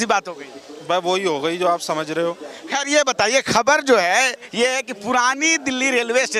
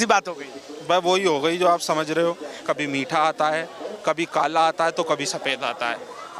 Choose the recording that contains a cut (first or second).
second